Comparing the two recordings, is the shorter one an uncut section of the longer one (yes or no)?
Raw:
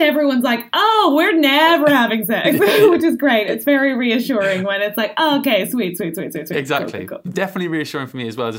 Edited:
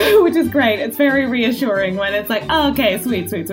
yes